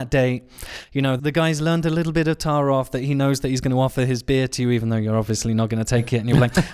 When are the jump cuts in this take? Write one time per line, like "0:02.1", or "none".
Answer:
0:01.2